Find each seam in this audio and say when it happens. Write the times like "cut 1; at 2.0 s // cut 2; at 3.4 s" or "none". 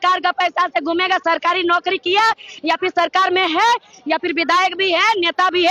none